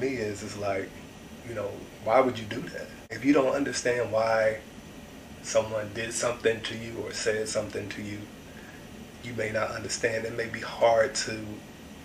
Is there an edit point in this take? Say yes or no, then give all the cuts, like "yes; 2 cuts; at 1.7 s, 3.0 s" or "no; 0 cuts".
yes; 1 cut; at 3.1 s